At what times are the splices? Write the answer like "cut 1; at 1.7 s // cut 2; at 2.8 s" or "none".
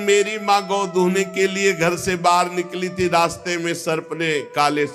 none